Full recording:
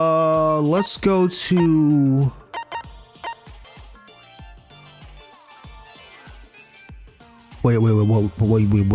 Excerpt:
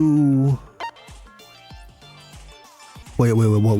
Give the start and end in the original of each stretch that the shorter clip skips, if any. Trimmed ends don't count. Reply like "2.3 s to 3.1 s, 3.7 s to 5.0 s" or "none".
2.7 s to 3.6 s, 5.7 s to 7.5 s